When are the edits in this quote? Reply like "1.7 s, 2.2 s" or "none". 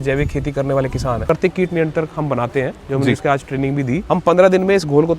1.3 s, 4.0 s